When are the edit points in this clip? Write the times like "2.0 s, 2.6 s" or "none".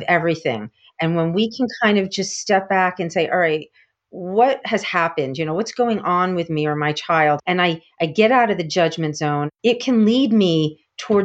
7.4 s, 9.5 s